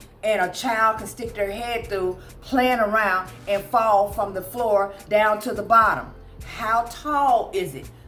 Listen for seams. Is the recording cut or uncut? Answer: uncut